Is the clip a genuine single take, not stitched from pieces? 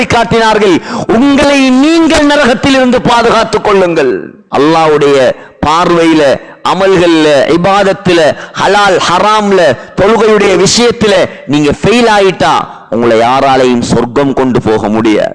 no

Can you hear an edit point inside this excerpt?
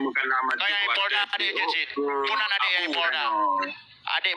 no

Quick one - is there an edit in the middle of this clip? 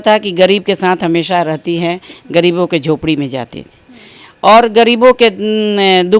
no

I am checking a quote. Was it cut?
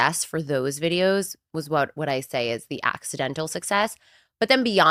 no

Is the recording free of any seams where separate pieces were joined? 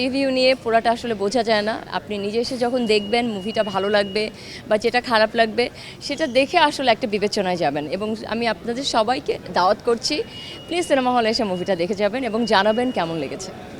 yes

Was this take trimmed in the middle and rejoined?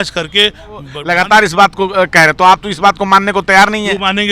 yes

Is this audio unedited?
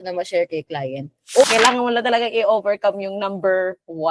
no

